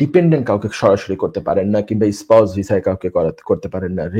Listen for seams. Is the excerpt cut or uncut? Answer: uncut